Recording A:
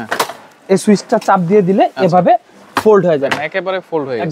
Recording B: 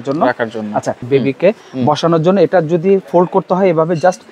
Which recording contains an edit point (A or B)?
B